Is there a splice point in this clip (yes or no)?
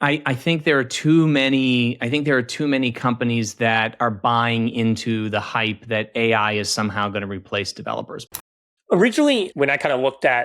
yes